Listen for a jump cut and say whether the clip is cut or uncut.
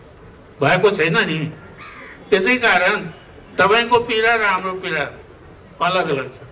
uncut